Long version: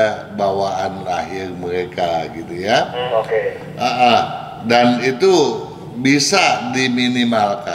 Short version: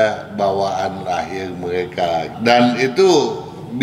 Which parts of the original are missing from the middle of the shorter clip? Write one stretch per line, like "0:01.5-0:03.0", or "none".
0:02.3-0:04.6